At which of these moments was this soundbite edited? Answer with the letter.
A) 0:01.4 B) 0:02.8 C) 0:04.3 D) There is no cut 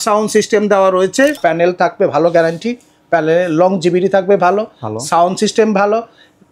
A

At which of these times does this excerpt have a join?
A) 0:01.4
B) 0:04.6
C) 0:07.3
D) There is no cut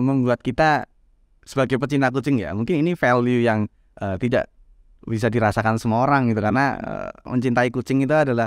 C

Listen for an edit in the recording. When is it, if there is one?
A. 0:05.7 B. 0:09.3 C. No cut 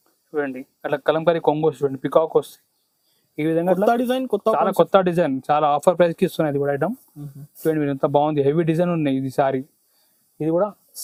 C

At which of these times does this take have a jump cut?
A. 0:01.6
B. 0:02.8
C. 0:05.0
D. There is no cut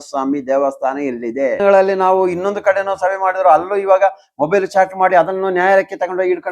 A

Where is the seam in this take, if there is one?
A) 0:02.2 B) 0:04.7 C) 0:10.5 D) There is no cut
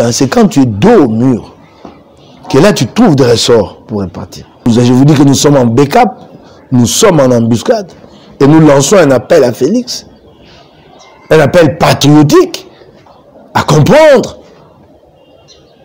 B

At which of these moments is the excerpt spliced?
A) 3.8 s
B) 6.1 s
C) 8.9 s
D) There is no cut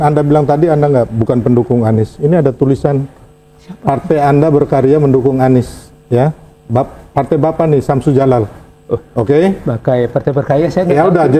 D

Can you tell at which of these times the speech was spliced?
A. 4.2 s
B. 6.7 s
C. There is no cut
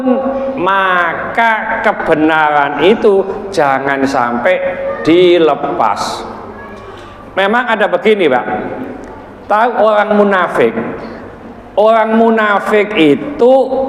C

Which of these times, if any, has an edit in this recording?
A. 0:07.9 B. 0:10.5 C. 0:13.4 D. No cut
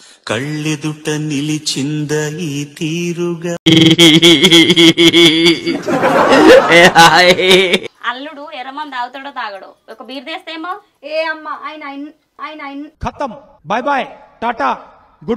A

